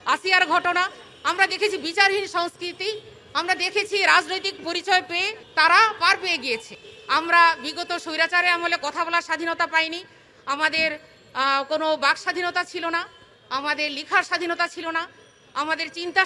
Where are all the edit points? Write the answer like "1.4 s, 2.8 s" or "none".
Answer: 6.8 s